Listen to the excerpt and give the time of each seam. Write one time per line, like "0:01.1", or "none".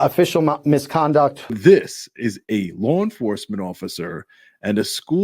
0:01.6